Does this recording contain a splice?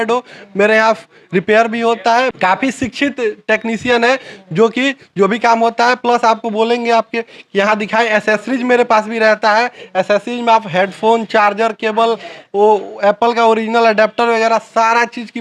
no; 0 cuts

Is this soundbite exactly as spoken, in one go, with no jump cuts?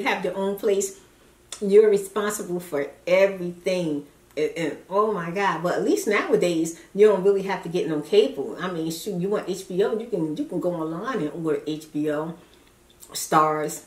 yes; 0 cuts

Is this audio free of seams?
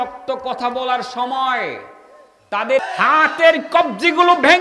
no; 1 cut; at 2.8 s

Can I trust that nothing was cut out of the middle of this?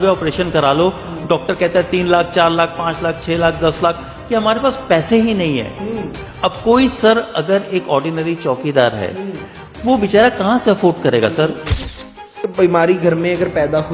no; 1 cut; at 12.2 s

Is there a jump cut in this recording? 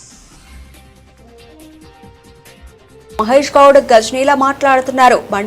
yes; 1 cut; at 2.7 s

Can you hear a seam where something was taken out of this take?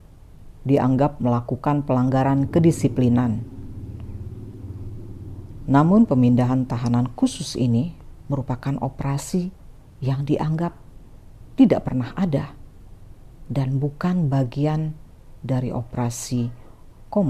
no; 0 cuts

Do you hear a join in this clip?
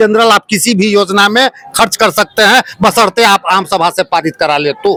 no; 0 cuts

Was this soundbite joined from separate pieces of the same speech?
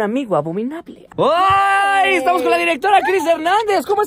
yes; 1 cut; at 1.1 s

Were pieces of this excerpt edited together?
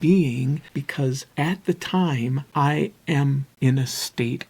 yes; 3 cuts; at 0.9 s, 2.4 s, 3.5 s

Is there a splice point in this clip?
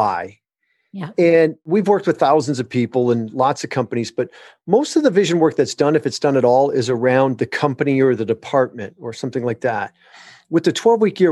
yes; 1 cut; at 1.6 s

